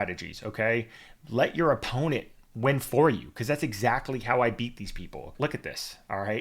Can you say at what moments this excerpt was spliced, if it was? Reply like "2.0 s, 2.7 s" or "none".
5.3 s